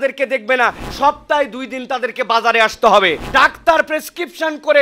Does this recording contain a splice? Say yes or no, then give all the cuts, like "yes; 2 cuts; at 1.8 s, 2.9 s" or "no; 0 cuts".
yes; 2 cuts; at 0.8 s, 3.2 s